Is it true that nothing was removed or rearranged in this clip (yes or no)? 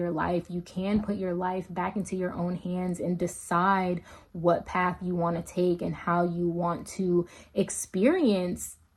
yes